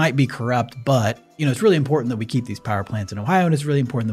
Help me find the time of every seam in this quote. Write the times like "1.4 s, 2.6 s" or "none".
1.3 s